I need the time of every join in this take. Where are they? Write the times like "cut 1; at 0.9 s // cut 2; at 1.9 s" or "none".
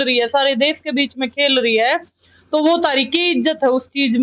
none